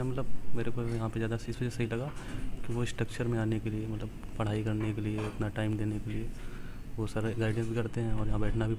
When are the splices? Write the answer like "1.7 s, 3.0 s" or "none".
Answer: none